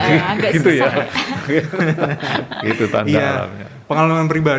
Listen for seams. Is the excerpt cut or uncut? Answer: uncut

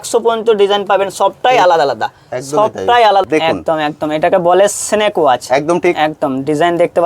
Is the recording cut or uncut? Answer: cut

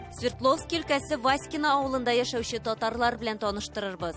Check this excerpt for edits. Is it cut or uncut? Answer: uncut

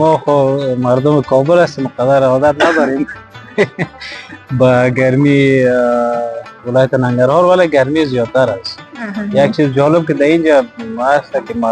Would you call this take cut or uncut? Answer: uncut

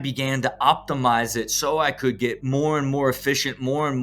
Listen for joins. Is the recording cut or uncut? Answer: cut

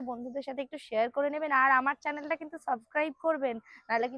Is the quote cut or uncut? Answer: uncut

